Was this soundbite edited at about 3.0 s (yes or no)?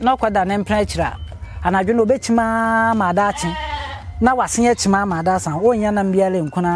no